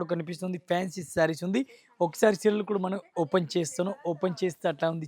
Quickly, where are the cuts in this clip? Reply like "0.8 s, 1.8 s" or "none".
none

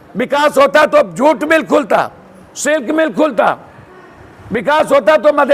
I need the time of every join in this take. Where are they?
none

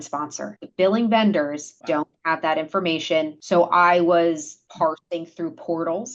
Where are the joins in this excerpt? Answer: 1.7 s, 3.4 s, 4.6 s

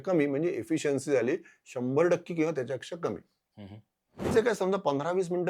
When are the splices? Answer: 4.3 s

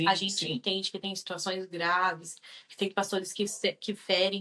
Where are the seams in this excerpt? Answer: none

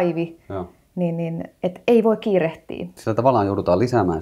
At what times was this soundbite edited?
2.9 s

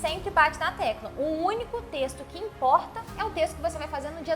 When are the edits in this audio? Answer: none

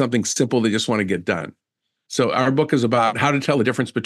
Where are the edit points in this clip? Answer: 3.1 s

